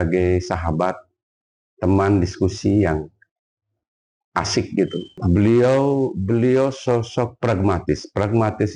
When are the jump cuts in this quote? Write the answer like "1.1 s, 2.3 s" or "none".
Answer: 5.1 s